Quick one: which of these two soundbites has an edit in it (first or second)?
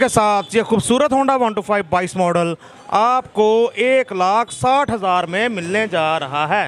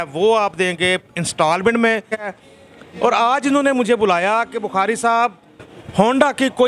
second